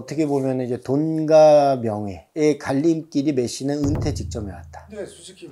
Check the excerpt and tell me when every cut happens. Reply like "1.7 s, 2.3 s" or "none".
none